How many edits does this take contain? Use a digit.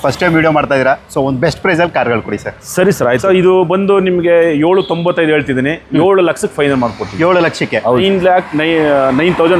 2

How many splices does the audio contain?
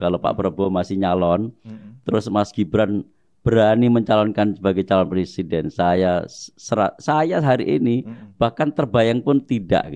0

